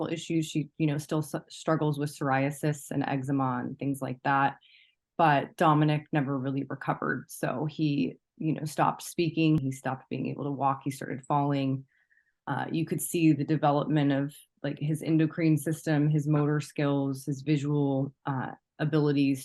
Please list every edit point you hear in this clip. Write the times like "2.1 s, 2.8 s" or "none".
9.6 s